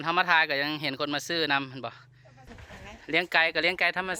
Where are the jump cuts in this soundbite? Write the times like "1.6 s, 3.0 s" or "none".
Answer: 2.6 s

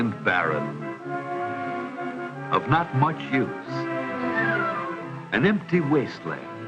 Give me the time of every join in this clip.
5.8 s

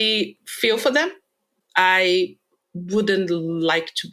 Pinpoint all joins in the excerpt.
1.3 s

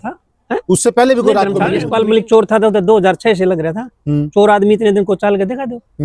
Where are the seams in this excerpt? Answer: 1.8 s

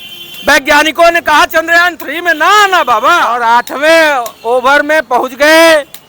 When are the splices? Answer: 3.3 s

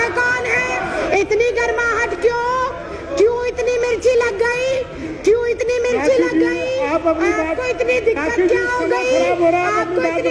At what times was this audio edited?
1.0 s

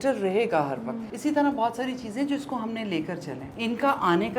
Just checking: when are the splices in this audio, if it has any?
1.0 s, 3.4 s

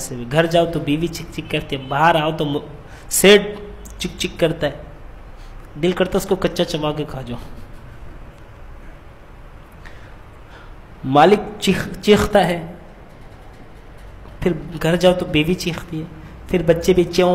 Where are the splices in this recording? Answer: none

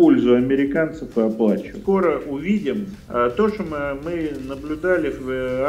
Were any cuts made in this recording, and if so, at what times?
1.7 s, 2.9 s

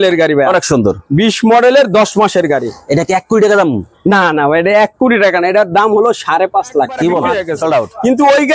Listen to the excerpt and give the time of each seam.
7.5 s

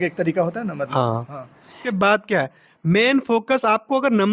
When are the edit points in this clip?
1.8 s

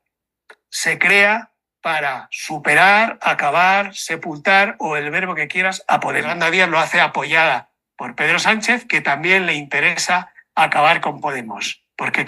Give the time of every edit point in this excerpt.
6.4 s

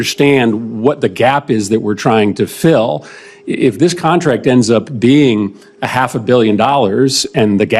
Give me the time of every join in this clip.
none

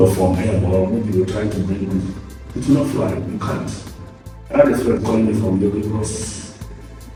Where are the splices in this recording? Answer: none

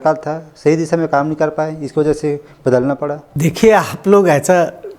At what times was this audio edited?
3.3 s

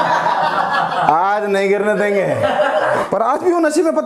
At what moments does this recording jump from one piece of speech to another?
3.0 s

